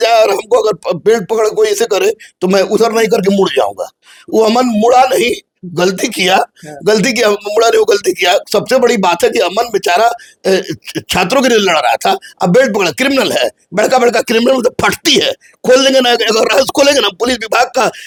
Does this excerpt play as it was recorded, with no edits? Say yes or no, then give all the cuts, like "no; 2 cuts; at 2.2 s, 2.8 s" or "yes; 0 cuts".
yes; 0 cuts